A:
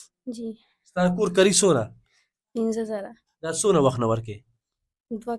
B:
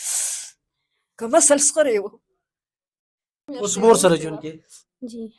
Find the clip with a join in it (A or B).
B